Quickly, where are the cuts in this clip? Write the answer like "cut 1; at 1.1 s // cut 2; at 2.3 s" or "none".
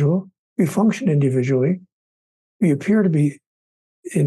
none